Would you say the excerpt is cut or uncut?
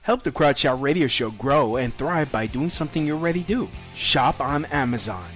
cut